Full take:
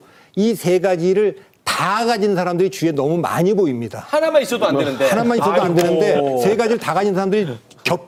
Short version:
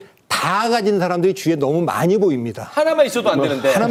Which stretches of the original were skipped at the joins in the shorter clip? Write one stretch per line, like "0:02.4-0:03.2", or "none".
none